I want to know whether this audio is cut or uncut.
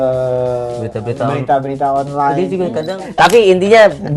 cut